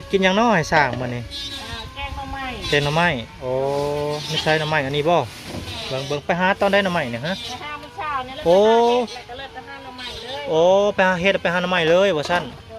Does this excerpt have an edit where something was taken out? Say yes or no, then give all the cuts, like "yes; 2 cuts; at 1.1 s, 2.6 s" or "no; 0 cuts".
no; 0 cuts